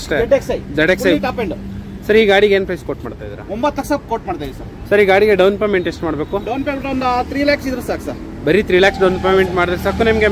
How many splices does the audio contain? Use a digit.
0